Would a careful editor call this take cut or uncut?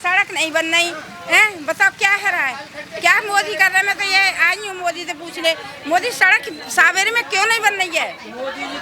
uncut